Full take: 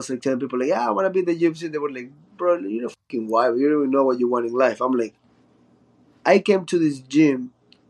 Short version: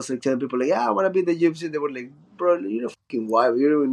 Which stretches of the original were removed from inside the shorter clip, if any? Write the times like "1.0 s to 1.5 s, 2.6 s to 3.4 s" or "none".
none